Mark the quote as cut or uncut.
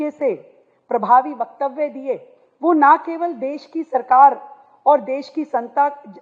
uncut